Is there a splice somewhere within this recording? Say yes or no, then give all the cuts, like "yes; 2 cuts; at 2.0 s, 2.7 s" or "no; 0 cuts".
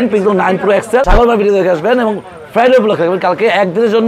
yes; 1 cut; at 1.0 s